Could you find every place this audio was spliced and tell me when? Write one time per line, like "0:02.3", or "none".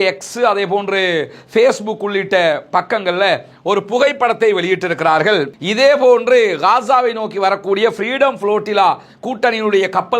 0:05.5